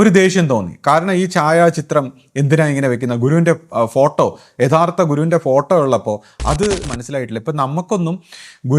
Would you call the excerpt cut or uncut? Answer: cut